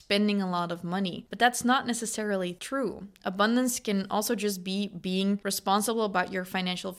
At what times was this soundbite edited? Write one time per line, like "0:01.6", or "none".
0:01.2
0:02.6
0:05.4